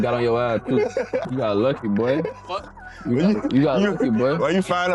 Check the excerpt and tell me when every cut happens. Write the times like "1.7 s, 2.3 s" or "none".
1.3 s